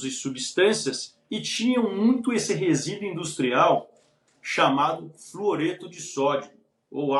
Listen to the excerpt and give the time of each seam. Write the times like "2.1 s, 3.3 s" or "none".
none